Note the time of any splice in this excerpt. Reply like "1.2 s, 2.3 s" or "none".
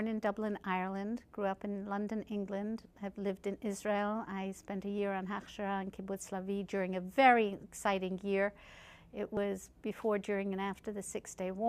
4.0 s